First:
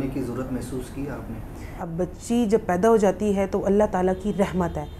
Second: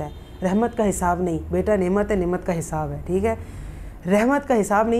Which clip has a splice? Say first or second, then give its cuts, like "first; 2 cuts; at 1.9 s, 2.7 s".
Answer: first; 1 cut; at 1.8 s